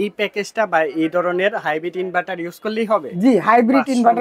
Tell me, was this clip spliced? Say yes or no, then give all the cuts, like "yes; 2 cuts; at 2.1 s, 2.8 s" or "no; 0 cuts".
no; 0 cuts